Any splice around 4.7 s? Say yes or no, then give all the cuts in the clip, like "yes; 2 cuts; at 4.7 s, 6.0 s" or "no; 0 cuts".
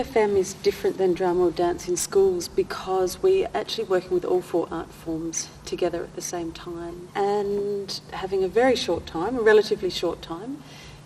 no; 1 cut; at 7.1 s